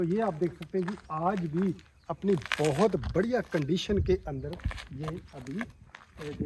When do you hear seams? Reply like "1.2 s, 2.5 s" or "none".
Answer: none

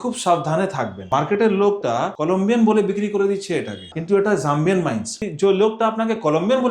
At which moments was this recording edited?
1.0 s, 2.1 s, 3.9 s, 5.2 s

